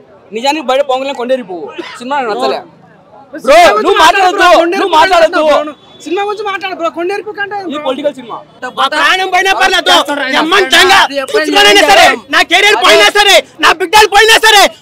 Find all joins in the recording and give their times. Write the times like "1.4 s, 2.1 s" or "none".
8.6 s